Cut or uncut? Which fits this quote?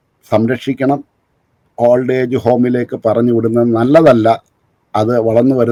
uncut